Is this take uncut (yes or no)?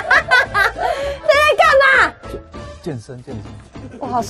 yes